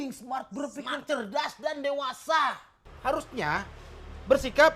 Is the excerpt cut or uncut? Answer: cut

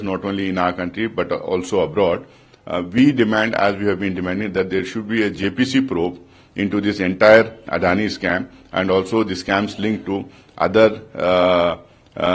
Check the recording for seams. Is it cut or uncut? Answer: uncut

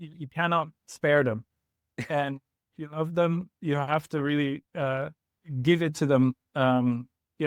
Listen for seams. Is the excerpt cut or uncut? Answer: uncut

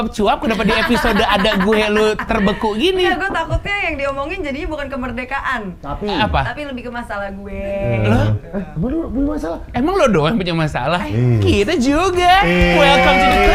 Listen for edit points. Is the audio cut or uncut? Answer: uncut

